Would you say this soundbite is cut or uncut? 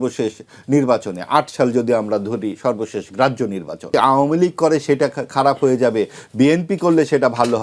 cut